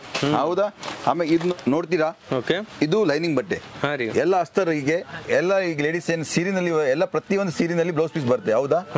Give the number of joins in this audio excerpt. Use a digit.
1